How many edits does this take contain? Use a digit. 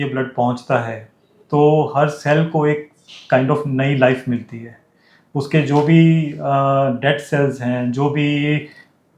0